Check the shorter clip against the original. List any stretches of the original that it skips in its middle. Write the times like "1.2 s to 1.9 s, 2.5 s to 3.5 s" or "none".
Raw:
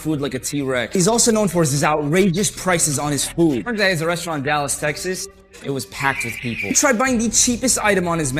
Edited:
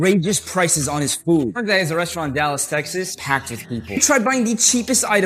5.3 s to 5.9 s